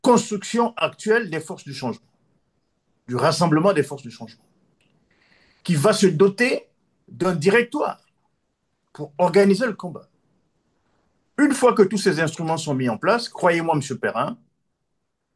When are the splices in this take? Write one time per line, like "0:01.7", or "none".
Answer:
none